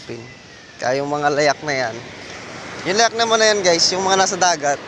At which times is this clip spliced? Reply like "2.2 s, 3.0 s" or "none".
none